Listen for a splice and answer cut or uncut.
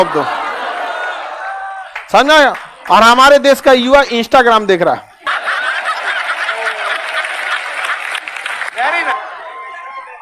cut